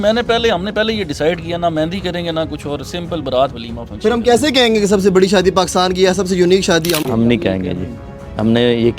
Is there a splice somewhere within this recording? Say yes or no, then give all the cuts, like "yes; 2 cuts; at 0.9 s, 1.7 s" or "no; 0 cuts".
yes; 1 cut; at 7.0 s